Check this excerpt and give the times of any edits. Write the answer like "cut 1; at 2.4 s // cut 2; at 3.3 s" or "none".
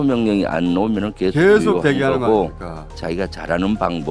cut 1; at 2.9 s